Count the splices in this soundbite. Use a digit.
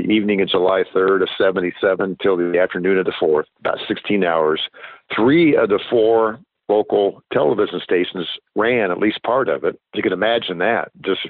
3